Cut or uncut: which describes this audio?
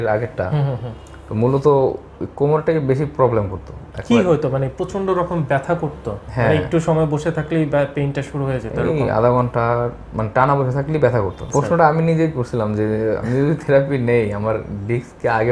cut